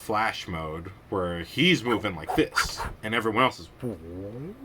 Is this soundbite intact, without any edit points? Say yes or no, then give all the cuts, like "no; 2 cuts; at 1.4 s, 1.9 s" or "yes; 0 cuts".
no; 2 cuts; at 0.9 s, 3.7 s